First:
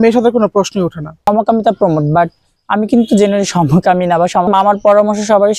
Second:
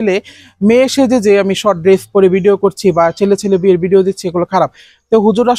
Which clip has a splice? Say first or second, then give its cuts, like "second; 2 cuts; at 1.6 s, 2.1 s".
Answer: first; 2 cuts; at 1.3 s, 4.5 s